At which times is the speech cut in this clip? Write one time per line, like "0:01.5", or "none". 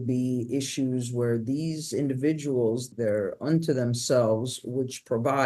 0:02.9